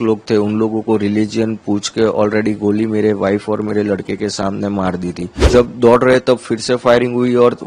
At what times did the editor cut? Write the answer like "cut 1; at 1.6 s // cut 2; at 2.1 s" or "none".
cut 1; at 5.4 s